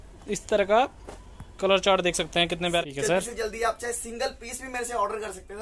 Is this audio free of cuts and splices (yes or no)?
no